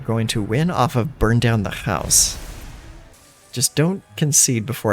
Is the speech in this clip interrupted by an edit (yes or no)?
yes